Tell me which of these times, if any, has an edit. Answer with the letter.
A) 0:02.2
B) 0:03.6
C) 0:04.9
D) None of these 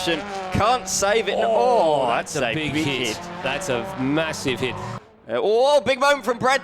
C